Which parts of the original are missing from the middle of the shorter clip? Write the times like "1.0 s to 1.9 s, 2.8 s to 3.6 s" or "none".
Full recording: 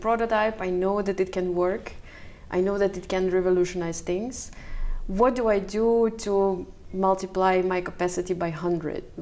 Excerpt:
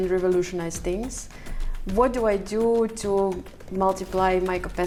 none